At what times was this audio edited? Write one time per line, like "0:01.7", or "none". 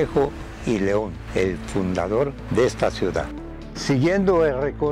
none